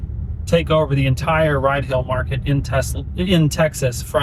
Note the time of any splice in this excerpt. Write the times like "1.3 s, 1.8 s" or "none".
none